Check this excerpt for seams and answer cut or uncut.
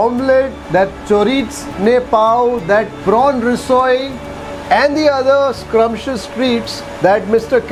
uncut